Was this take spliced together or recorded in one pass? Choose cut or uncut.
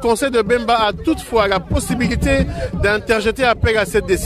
uncut